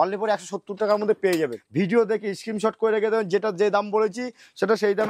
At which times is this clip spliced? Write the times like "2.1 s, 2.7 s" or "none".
1.6 s